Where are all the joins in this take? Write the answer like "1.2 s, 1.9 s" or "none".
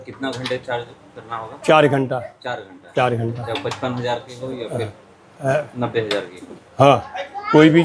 none